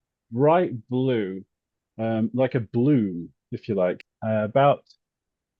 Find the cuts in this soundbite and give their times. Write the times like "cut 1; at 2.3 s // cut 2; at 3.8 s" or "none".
cut 1; at 4.0 s